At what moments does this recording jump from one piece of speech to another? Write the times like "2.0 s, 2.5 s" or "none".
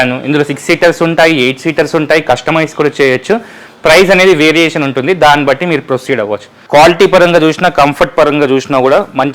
6.5 s